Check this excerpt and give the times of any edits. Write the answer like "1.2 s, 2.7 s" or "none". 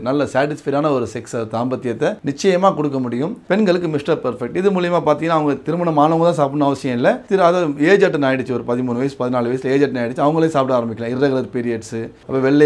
2.2 s, 3.4 s

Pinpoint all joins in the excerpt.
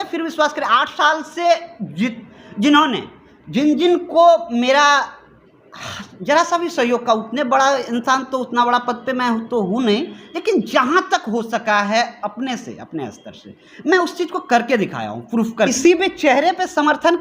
15.7 s

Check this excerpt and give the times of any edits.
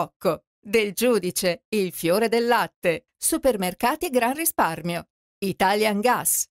none

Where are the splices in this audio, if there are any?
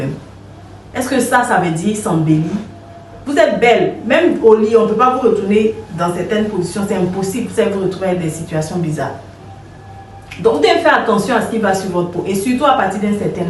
none

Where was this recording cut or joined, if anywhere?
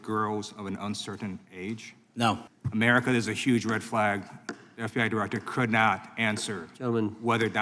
2.5 s

